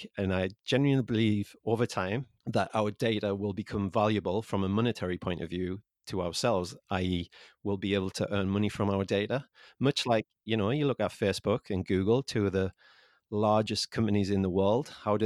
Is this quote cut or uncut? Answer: cut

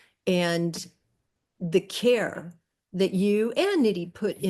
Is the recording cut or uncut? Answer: uncut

